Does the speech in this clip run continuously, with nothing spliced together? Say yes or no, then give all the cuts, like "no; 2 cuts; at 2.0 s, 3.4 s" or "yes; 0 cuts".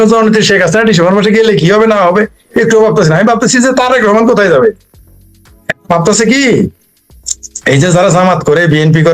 yes; 0 cuts